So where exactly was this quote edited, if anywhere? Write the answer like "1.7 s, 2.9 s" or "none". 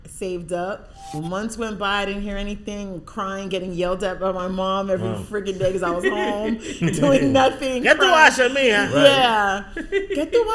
1.2 s